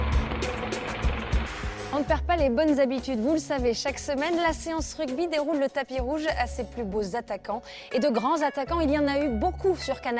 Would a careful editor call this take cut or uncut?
cut